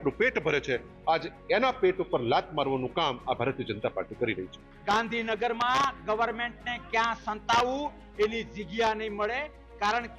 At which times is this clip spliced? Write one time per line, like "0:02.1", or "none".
0:04.7